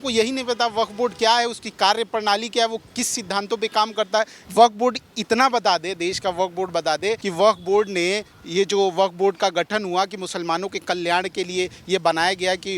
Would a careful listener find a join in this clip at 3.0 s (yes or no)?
no